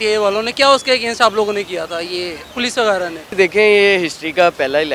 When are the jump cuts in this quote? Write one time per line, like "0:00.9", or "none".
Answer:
0:02.4
0:03.3